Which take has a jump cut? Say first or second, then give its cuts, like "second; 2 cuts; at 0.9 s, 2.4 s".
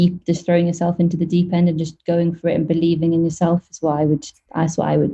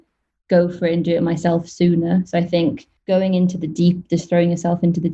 second; 1 cut; at 2.9 s